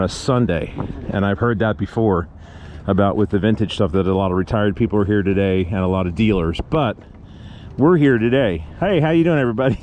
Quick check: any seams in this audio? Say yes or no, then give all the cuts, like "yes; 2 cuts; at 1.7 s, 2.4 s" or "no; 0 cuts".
no; 0 cuts